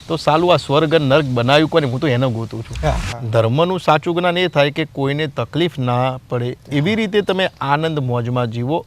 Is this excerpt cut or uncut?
cut